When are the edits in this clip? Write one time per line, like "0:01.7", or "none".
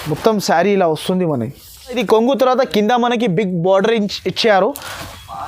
0:02.0